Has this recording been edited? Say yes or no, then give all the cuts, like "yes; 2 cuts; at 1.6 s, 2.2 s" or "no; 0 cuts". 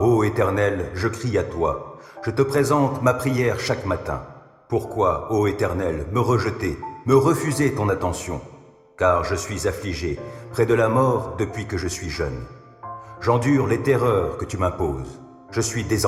no; 0 cuts